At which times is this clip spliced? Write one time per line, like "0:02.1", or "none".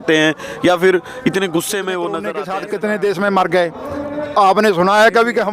0:02.4